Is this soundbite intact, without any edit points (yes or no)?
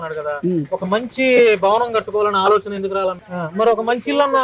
no